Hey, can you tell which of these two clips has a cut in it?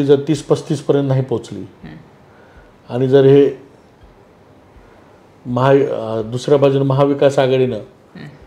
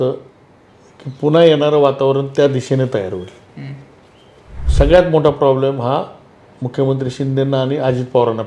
second; 1 cut; at 4.6 s

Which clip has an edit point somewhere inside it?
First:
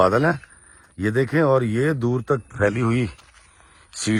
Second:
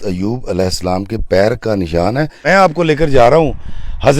second; 1 cut; at 2.4 s

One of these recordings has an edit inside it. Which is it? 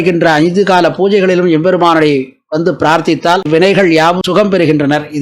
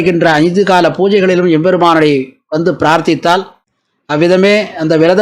second; 1 cut; at 3.5 s

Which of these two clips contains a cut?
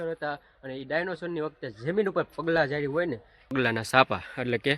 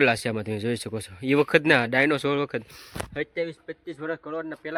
first; 1 cut; at 3.5 s

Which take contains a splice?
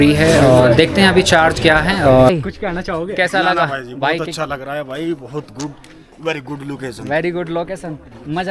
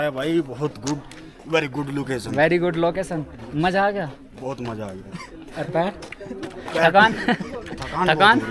first; 1 cut; at 2.3 s

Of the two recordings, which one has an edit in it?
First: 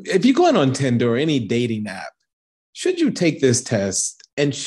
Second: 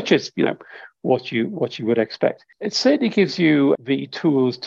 second; 2 cuts; at 2.5 s, 3.8 s

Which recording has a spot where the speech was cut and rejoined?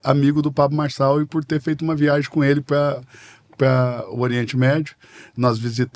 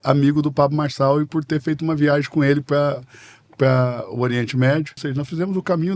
second; 1 cut; at 5.0 s

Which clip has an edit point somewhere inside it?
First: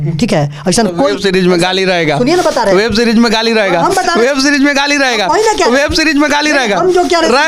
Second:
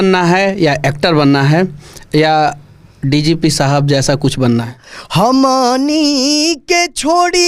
second; 1 cut; at 4.8 s

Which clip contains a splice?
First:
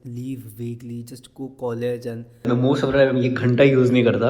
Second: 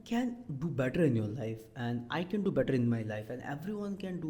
first; 1 cut; at 2.4 s

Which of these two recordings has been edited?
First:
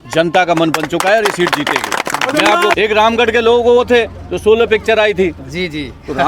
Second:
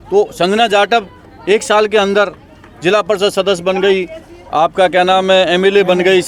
first; 1 cut; at 2.8 s

